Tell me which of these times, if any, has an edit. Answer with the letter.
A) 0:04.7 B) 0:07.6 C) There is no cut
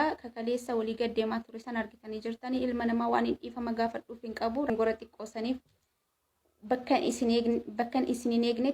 A